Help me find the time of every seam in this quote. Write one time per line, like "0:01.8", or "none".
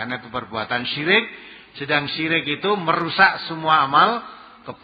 none

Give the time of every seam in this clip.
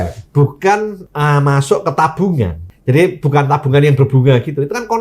0:01.0
0:02.7

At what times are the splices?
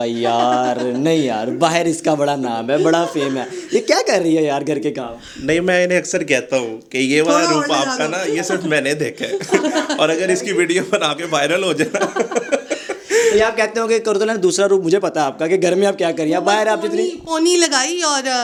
none

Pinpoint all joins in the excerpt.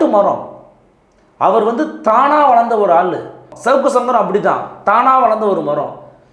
0:03.5

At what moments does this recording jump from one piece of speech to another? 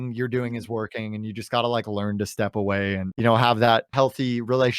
0:03.1
0:03.9

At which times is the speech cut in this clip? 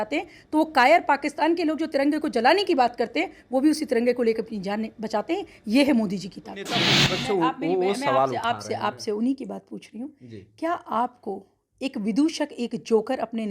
0:06.9

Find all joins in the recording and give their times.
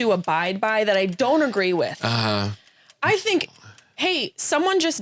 none

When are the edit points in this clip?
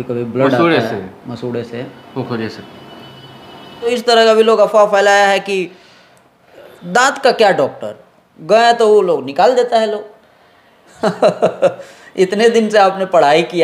0:03.9

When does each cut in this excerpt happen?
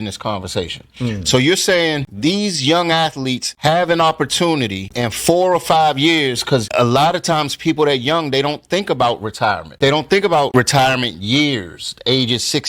0:09.7

